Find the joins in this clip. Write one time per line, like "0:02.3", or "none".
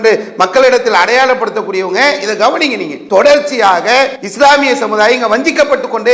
0:02.9
0:04.2